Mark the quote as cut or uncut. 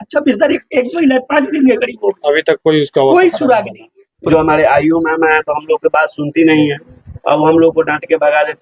cut